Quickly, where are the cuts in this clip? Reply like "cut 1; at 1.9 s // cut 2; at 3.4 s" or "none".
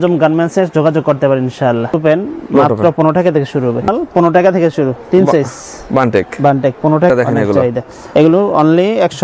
cut 1; at 1.9 s // cut 2; at 3.9 s // cut 3; at 7.1 s